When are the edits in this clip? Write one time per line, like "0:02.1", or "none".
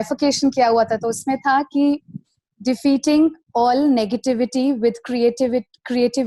none